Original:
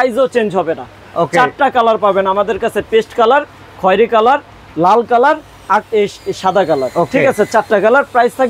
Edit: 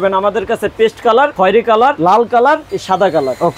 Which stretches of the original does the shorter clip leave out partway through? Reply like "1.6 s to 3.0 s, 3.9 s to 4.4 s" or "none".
3.8 s to 4.4 s, 5.5 s to 6.3 s